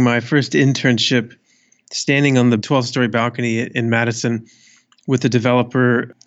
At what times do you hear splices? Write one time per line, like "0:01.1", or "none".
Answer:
0:02.6
0:03.7